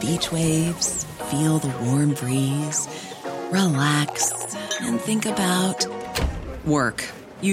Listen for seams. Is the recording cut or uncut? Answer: uncut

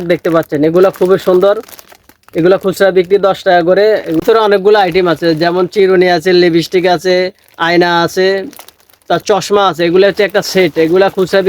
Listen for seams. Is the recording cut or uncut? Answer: cut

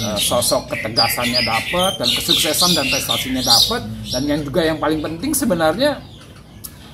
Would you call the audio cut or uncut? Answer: uncut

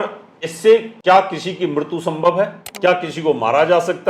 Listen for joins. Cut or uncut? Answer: cut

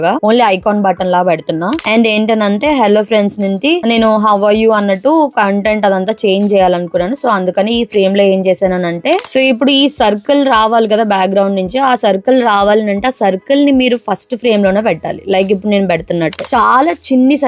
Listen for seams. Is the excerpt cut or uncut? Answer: cut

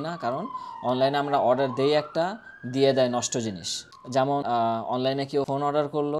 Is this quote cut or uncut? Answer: uncut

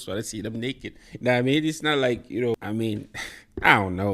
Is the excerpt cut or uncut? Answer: cut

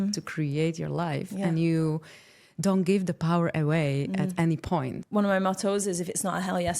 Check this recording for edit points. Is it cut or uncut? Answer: cut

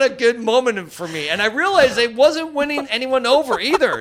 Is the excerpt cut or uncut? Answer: cut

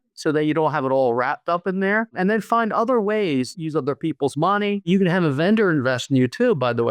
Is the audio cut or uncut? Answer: cut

